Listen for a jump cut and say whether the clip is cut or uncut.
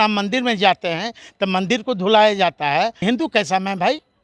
cut